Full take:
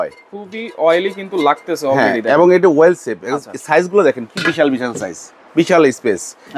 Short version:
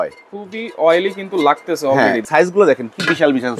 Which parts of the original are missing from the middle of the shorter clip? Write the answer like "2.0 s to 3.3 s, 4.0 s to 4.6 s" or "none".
2.2 s to 3.6 s